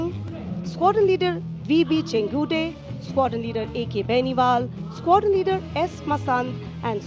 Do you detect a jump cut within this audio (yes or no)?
no